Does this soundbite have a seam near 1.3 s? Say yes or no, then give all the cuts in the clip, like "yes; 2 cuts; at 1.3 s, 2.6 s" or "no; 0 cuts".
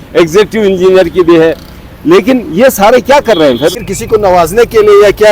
no; 1 cut; at 3.8 s